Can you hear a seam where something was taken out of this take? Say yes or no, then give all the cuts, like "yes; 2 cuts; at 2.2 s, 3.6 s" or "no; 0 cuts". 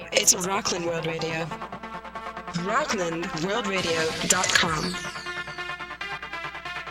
no; 0 cuts